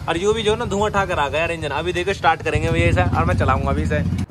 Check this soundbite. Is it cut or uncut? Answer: uncut